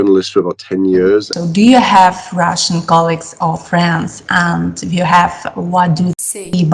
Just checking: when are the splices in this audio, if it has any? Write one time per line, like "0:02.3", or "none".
0:01.3